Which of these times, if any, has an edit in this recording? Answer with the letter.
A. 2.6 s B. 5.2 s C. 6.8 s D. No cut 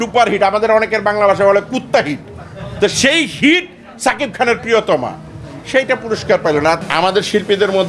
C